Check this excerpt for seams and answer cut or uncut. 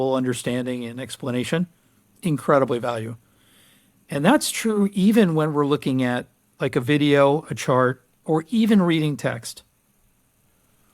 uncut